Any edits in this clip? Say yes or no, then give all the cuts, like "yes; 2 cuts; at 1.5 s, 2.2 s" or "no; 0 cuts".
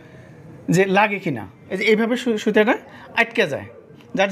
yes; 1 cut; at 1.8 s